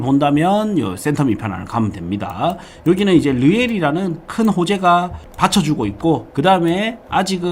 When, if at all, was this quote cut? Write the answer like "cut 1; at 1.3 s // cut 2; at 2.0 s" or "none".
cut 1; at 5.2 s // cut 2; at 6.3 s